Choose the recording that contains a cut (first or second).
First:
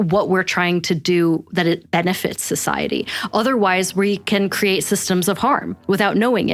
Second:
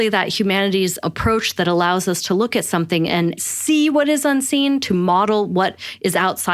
second